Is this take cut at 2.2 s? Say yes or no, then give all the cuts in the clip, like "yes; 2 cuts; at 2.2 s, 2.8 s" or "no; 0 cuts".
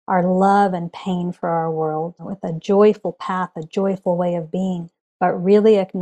yes; 1 cut; at 2.2 s